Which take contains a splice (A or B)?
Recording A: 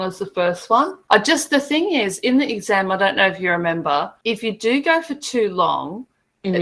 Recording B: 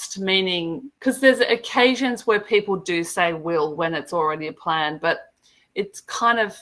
A